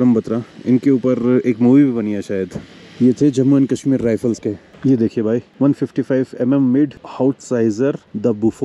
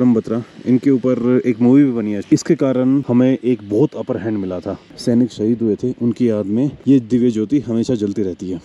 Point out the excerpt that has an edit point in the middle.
second; 2 cuts; at 2.1 s, 4.9 s

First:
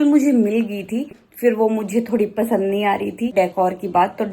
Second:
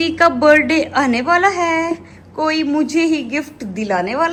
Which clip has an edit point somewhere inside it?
first; 2 cuts; at 1.2 s, 3.3 s

